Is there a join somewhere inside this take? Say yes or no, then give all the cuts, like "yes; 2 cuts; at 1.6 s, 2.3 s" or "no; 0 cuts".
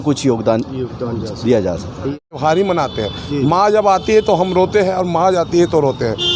yes; 1 cut; at 2.1 s